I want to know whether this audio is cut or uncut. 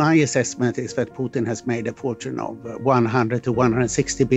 uncut